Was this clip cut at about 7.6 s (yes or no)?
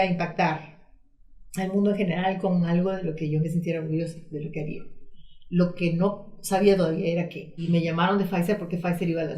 yes